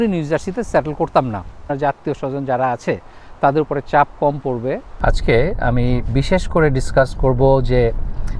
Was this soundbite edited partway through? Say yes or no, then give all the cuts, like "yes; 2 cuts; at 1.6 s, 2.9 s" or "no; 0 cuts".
yes; 2 cuts; at 1.6 s, 4.9 s